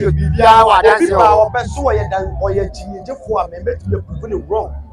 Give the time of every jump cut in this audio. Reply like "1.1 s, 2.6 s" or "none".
none